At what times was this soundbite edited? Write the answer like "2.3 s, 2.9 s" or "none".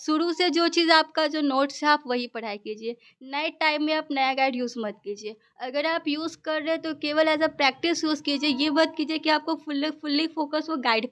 none